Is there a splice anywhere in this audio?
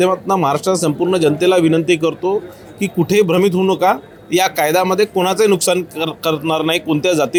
no; 0 cuts

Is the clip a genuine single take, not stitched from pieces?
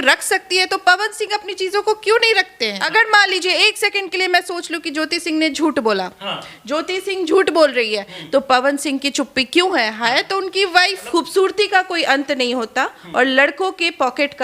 no; 2 cuts; at 2.8 s, 11.0 s

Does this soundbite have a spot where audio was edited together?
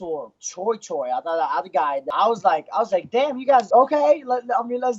yes; 2 cuts; at 2.0 s, 3.7 s

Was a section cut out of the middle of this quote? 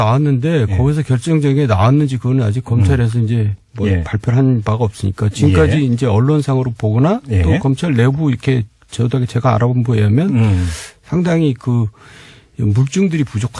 yes; 1 cut; at 2.8 s

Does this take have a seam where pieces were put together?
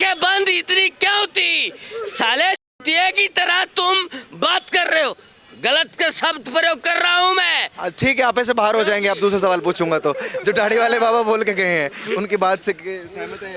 no; 0 cuts

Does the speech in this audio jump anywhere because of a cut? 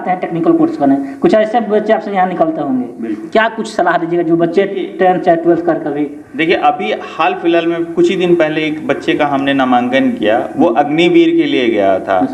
no; 0 cuts

